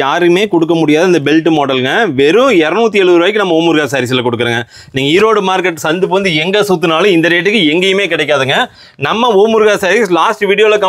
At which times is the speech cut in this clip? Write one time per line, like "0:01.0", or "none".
none